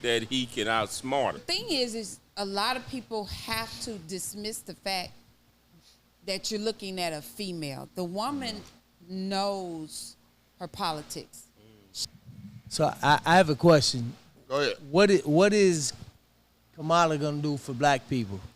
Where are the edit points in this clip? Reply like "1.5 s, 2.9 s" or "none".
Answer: 1.4 s, 12.0 s